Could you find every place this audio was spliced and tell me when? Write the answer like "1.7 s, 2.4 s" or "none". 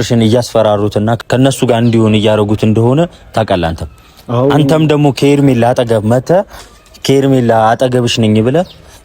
1.2 s